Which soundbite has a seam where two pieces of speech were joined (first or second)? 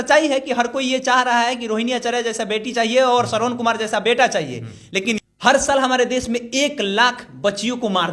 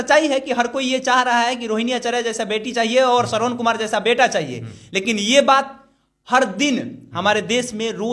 first